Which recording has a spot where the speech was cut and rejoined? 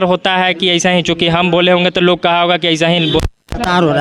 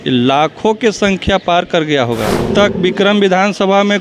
second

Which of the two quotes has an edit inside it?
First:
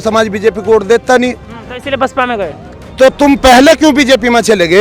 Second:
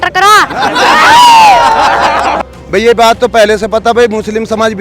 second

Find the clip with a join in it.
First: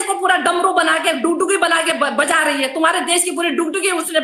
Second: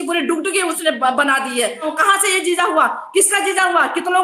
second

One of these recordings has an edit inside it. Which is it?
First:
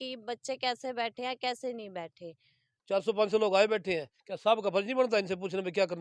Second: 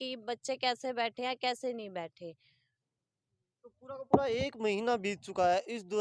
first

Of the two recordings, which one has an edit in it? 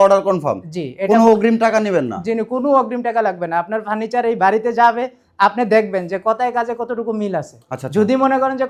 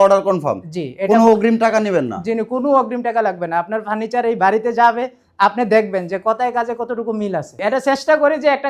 second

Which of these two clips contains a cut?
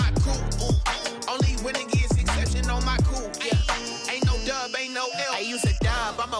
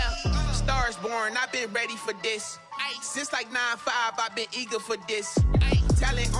first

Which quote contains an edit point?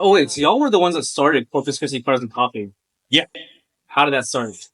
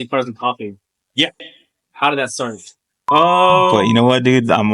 second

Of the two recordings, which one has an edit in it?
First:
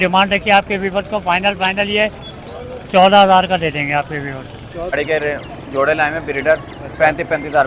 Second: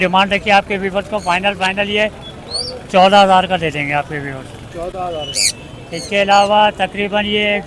first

